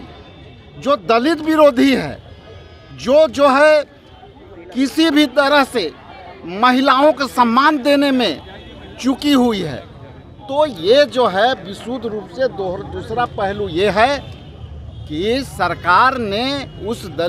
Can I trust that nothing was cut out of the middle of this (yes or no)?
yes